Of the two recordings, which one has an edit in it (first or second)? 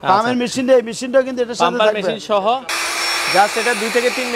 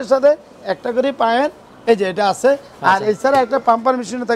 first